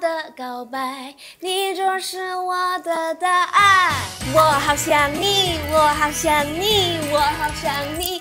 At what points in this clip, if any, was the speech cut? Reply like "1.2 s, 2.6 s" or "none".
none